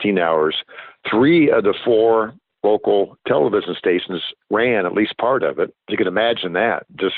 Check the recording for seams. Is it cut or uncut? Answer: cut